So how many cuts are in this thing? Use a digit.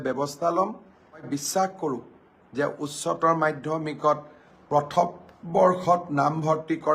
1